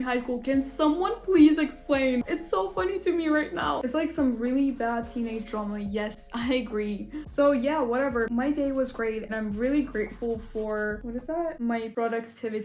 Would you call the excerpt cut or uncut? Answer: uncut